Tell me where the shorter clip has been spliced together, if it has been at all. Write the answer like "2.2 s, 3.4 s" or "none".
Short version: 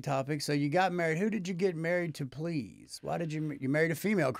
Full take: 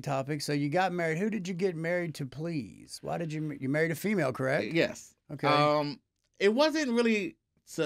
none